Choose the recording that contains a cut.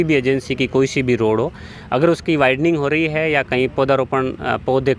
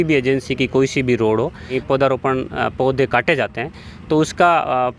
second; 1 cut; at 1.7 s

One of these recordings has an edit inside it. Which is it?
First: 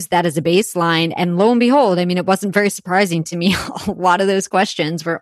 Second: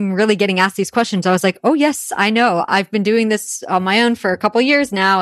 second; 1 cut; at 2.7 s

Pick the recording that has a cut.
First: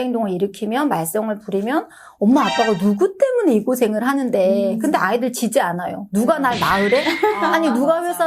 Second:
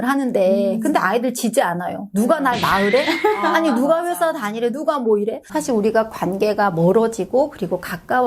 second; 1 cut; at 5.5 s

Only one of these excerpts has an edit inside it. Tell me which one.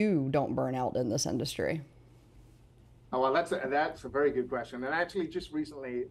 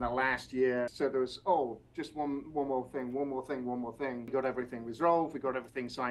second; 2 cuts; at 0.9 s, 4.3 s

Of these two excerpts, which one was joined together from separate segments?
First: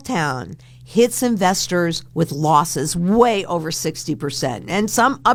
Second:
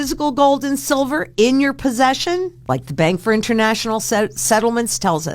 second; 1 cut; at 2.6 s

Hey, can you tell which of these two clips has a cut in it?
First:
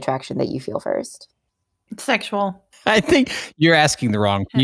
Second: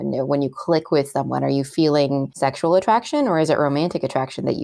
second; 1 cut; at 2.3 s

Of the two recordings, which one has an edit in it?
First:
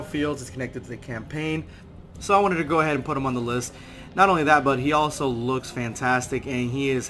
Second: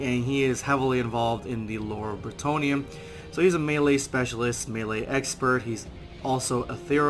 first; 1 cut; at 1.7 s

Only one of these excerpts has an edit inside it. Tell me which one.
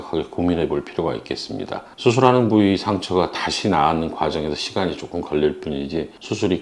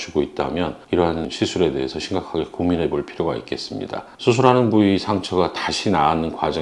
second; 1 cut; at 1.3 s

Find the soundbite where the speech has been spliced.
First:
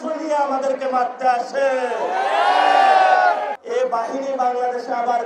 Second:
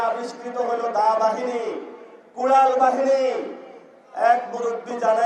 first; 1 cut; at 3.6 s

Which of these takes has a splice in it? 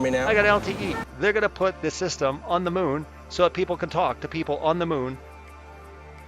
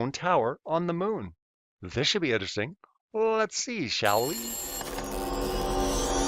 first; 1 cut; at 1.0 s

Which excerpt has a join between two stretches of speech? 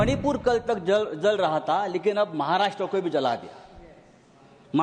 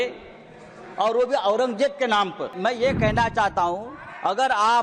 second; 1 cut; at 2.5 s

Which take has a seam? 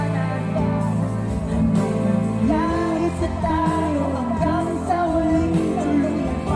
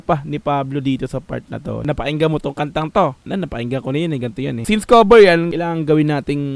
second; 4 cuts; at 1.8 s, 3.2 s, 4.6 s, 5.5 s

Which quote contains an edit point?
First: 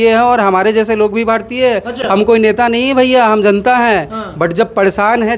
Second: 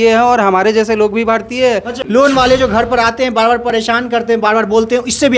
second; 1 cut; at 2.0 s

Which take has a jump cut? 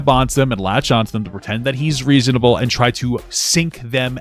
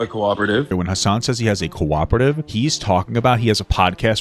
second; 2 cuts; at 0.7 s, 2.5 s

